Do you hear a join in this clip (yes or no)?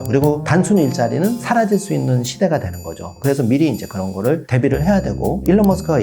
yes